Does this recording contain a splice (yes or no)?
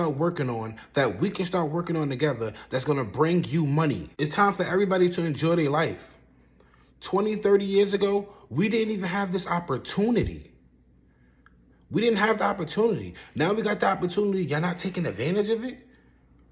yes